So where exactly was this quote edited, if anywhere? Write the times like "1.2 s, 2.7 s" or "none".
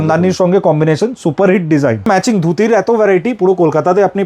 2.1 s